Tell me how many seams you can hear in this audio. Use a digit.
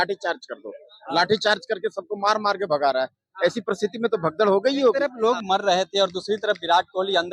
1